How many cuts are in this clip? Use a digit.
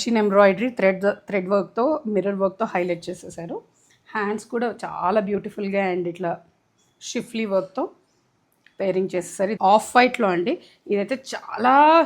1